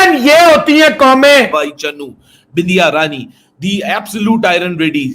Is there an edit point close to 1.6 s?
yes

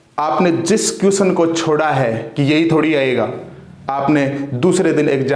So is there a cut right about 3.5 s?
no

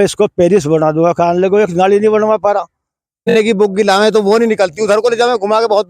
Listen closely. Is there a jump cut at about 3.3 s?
yes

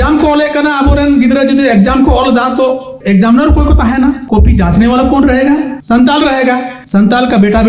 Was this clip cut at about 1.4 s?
no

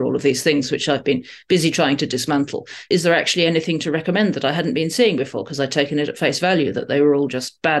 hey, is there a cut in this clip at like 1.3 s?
no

